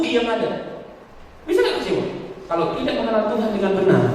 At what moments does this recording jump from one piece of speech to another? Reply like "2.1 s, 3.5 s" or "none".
2.3 s